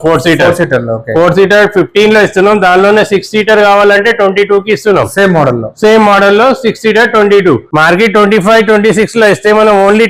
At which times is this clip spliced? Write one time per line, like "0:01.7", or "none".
0:07.7